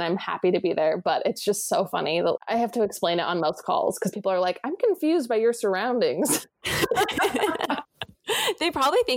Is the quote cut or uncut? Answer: uncut